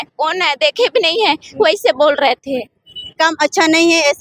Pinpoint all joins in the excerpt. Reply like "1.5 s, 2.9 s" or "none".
3.1 s